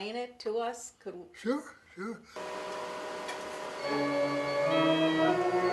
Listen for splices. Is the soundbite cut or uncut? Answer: cut